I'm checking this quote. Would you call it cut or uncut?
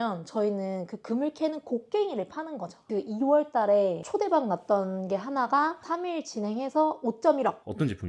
cut